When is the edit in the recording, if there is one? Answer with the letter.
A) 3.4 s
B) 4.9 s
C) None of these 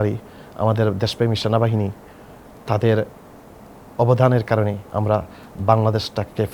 B